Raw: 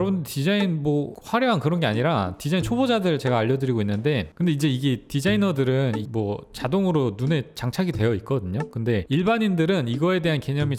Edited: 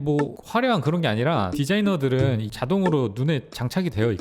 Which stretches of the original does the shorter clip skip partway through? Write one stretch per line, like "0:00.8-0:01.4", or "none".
0:02.3-0:05.1
0:06.0-0:06.5